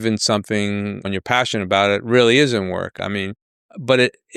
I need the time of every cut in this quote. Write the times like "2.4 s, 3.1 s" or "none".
none